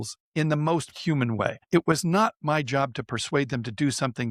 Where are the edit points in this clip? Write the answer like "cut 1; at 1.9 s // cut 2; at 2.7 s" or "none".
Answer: cut 1; at 0.9 s